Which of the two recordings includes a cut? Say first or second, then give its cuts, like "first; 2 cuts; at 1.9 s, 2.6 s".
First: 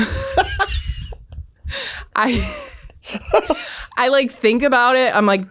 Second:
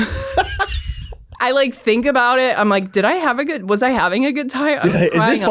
second; 1 cut; at 1.2 s